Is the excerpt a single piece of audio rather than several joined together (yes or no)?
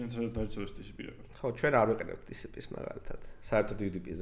yes